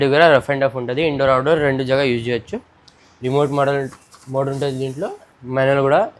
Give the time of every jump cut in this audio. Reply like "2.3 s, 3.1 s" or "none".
none